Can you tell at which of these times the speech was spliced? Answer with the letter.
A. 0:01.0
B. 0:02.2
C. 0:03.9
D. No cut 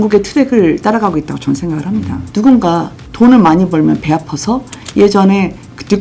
B